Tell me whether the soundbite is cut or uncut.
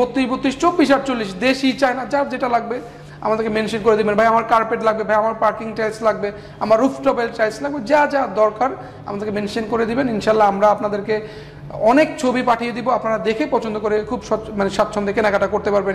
uncut